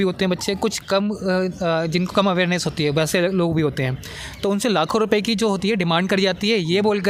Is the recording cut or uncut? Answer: uncut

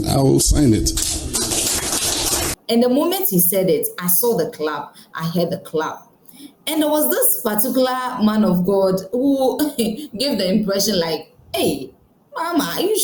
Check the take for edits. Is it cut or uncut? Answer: uncut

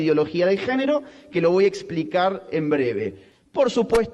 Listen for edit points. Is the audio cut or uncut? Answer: cut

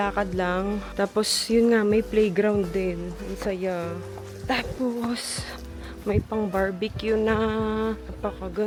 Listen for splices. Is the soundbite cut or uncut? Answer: uncut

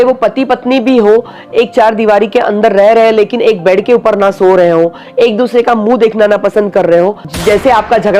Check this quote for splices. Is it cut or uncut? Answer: cut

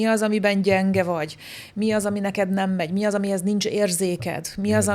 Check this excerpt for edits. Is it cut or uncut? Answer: uncut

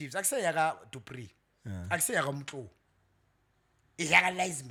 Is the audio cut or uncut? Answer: uncut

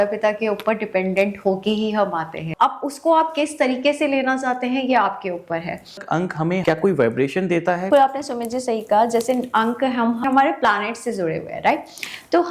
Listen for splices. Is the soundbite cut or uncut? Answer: cut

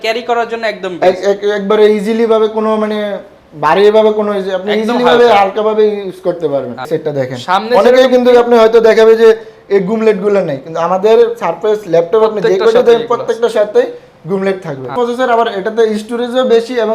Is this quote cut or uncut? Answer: cut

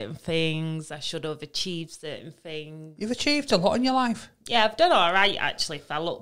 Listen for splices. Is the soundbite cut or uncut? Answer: uncut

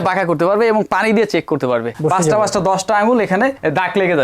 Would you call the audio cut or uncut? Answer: cut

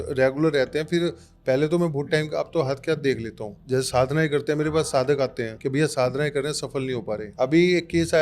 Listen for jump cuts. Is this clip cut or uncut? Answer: cut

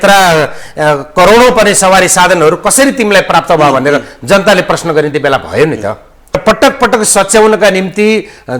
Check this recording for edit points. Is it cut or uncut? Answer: cut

